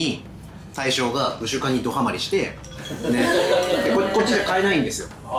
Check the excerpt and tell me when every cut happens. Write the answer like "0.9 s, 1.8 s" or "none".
none